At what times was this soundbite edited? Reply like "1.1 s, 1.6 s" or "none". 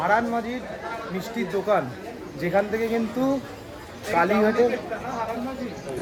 none